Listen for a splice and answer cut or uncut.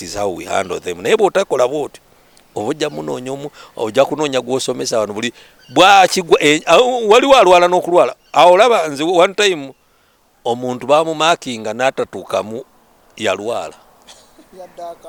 uncut